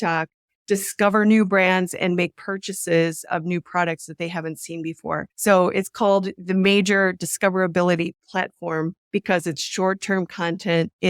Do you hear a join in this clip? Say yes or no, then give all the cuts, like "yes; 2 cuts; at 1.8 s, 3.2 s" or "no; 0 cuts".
no; 0 cuts